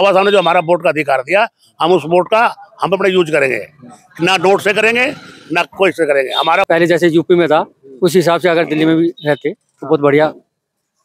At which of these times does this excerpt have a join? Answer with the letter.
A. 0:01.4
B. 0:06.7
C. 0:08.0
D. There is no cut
B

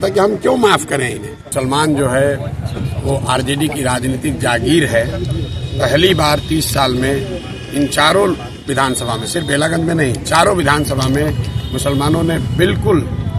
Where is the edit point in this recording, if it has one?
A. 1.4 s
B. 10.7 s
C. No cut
A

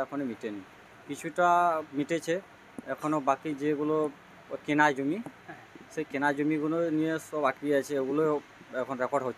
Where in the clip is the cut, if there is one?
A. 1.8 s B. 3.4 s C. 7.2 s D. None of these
D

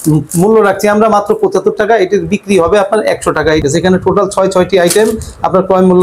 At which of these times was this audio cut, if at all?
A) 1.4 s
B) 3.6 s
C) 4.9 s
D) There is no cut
B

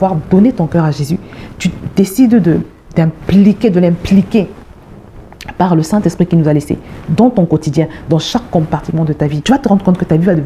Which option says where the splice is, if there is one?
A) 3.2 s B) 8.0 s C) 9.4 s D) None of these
C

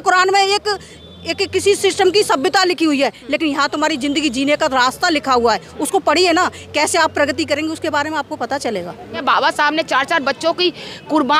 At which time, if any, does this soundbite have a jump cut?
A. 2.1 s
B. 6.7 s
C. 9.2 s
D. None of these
C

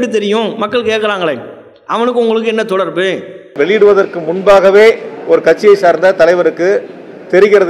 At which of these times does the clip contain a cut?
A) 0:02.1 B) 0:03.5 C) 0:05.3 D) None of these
B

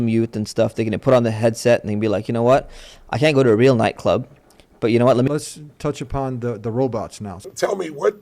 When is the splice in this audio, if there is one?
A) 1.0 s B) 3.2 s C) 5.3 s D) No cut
C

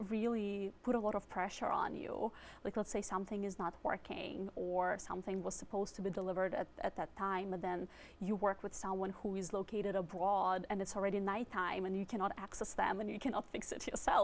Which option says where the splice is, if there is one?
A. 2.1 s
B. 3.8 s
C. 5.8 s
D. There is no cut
D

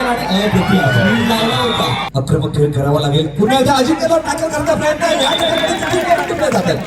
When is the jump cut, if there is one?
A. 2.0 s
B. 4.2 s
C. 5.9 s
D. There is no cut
A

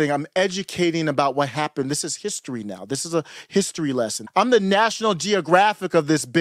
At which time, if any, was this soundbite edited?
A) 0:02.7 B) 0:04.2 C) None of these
B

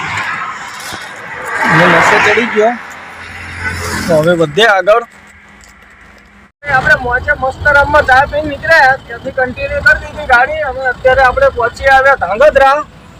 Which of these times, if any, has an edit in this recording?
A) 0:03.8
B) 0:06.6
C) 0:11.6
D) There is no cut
D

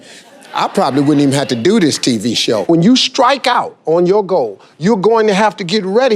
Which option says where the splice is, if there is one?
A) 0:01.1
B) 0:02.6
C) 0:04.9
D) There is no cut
B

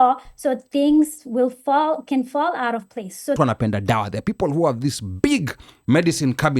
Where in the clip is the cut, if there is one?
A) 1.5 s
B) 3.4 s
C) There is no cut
B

